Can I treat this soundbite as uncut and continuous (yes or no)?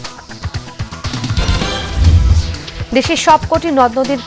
yes